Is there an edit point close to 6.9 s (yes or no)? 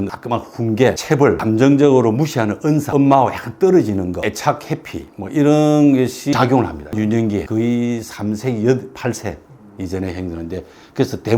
yes